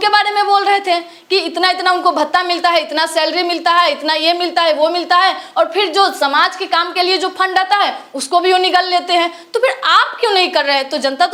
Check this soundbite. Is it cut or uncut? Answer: uncut